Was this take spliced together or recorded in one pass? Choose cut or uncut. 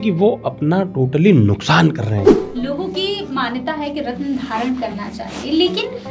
cut